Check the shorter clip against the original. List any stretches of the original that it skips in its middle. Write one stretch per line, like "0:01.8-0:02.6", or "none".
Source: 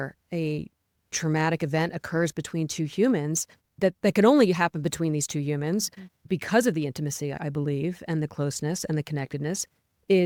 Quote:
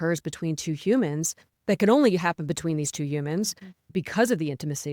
0:03.7-0:04.0